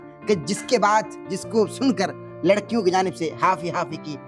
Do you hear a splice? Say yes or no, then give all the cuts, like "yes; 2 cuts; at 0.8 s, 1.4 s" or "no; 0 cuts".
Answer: no; 0 cuts